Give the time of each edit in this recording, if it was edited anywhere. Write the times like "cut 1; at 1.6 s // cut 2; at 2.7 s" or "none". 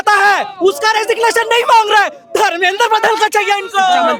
none